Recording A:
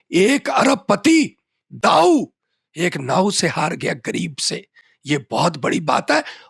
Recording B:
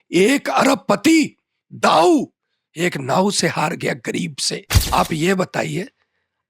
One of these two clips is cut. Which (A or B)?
B